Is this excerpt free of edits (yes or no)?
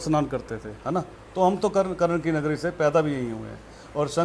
yes